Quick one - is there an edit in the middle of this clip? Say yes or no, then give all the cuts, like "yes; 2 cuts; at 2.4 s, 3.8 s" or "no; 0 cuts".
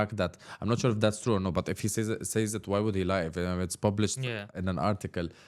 yes; 1 cut; at 4.5 s